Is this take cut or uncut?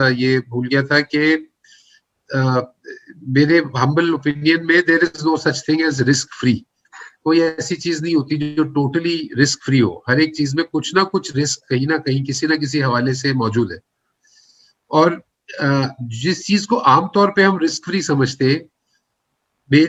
uncut